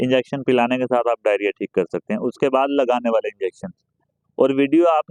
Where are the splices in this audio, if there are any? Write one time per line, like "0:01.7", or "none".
none